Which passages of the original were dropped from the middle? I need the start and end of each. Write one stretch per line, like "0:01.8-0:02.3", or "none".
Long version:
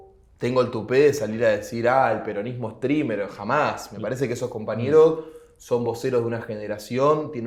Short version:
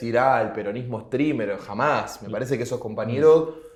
none